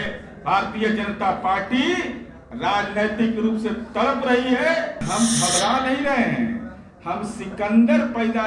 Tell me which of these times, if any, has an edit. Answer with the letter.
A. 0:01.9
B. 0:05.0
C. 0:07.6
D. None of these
B